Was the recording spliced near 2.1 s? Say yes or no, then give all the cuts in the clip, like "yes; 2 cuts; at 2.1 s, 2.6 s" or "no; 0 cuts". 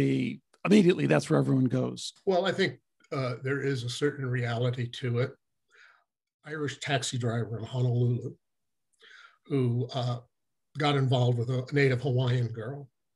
yes; 2 cuts; at 2.1 s, 6.3 s